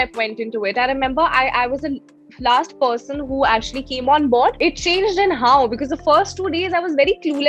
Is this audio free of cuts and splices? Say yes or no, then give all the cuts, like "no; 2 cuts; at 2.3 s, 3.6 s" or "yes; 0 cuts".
no; 1 cut; at 4.6 s